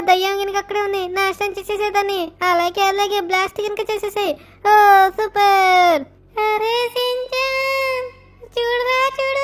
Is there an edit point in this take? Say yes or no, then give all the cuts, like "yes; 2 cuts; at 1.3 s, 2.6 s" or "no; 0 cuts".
no; 0 cuts